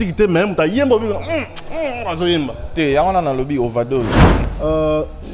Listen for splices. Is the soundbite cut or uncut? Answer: cut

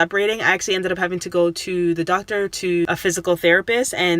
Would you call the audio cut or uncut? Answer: cut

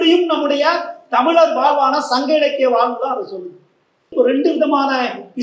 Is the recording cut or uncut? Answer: cut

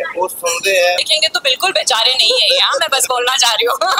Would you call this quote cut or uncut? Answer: cut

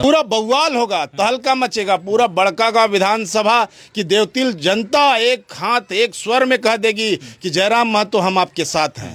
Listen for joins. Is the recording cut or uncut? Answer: uncut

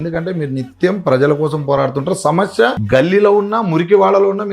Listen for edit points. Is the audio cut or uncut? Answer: cut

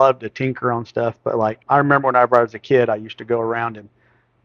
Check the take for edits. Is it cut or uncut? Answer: cut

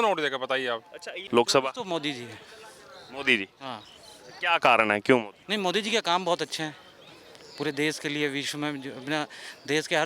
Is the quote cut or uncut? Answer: cut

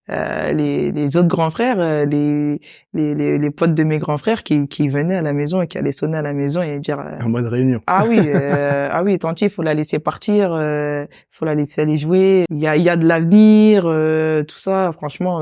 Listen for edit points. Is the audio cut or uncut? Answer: cut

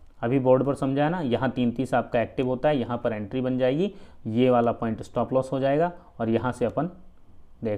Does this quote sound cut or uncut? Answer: uncut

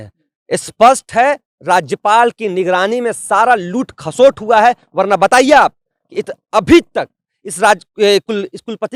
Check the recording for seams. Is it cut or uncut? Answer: uncut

